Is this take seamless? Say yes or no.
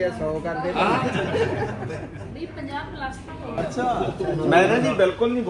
no